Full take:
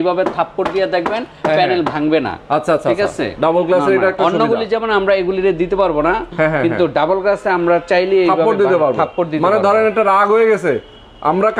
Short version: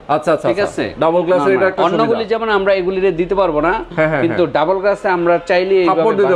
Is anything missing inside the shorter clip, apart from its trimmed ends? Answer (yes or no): no